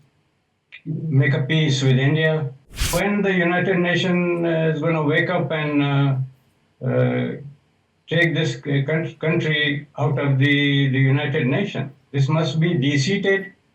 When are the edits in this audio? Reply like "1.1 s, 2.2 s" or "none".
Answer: 2.9 s